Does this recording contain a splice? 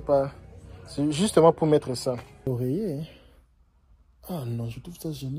yes; 1 cut; at 2.5 s

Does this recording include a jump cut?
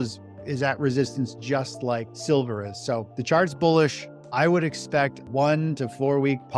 yes; 3 cuts; at 2.1 s, 3.1 s, 5.2 s

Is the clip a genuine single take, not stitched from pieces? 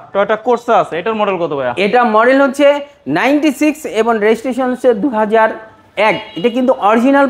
yes; 0 cuts

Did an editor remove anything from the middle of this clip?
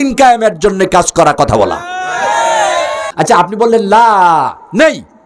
yes; 1 cut; at 3.1 s

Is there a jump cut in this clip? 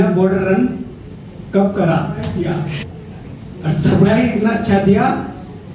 yes; 1 cut; at 2.3 s

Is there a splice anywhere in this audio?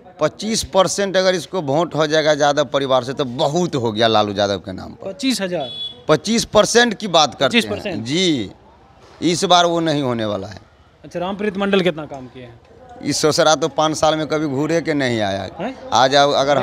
no; 0 cuts

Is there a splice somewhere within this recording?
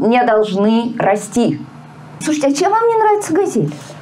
yes; 1 cut; at 2.2 s

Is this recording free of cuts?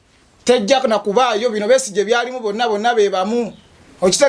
yes; 0 cuts

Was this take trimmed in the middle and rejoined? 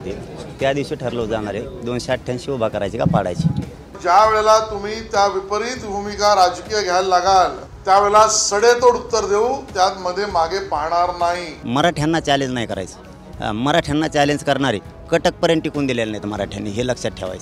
yes; 4 cuts; at 4.0 s, 7.7 s, 11.6 s, 14.9 s

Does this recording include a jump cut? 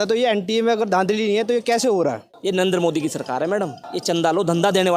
yes; 2 cuts; at 2.3 s, 3.9 s

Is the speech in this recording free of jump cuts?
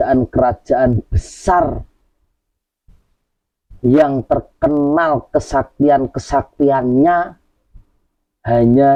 yes; 0 cuts

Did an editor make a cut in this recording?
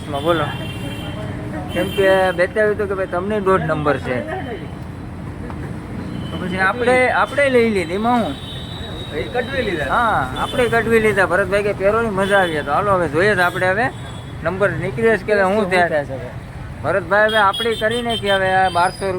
no; 0 cuts

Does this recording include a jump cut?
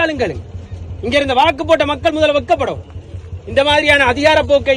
no; 0 cuts

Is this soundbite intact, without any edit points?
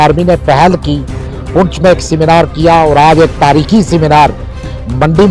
yes; 0 cuts

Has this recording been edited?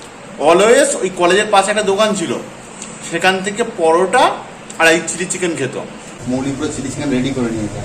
yes; 1 cut; at 6.1 s

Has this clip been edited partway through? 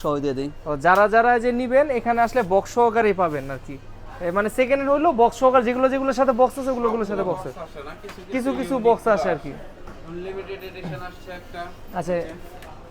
no; 0 cuts

